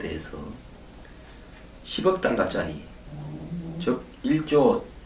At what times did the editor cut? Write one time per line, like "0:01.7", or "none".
0:03.2